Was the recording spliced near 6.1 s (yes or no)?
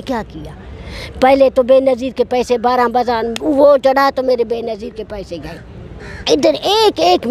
yes